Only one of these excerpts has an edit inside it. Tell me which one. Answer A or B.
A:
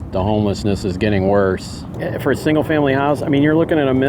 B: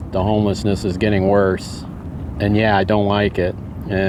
A